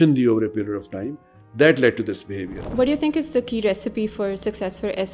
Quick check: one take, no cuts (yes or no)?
no